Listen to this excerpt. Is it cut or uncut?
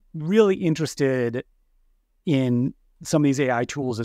uncut